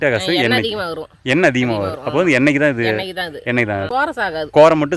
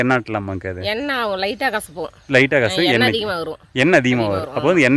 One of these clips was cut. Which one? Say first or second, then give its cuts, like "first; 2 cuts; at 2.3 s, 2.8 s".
first; 1 cut; at 3.9 s